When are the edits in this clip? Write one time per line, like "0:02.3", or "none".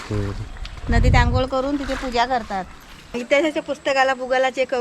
0:03.1

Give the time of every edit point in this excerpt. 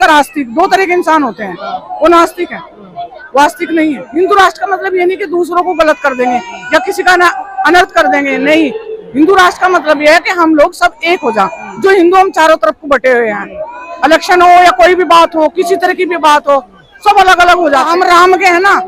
0:04.0
0:17.9

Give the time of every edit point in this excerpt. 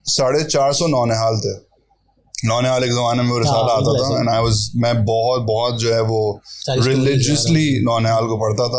none

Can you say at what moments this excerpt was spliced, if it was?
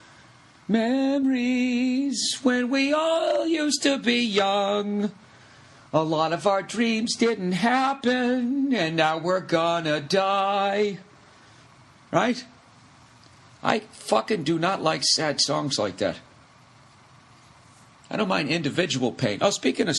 0:15.7

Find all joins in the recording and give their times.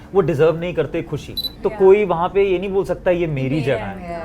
0:01.5

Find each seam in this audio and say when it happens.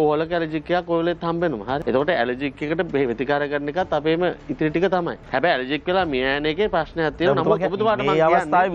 0:01.8
0:05.2

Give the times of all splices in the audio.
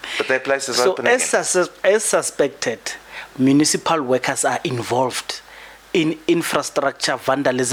none

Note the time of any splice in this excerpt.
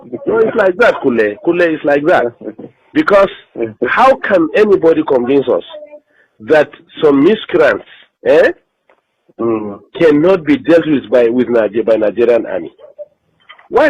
none

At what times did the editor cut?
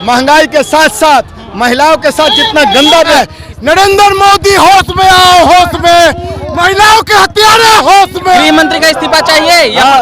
0:03.1
0:08.4

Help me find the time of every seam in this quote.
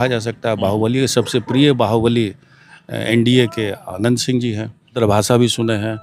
0:05.0

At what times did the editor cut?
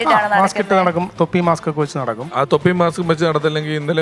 0:02.2

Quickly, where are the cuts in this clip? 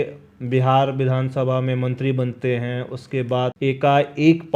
0:03.5

